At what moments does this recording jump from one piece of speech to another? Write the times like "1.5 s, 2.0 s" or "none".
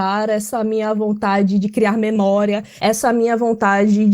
2.7 s